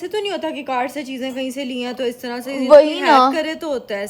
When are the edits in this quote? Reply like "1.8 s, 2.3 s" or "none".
none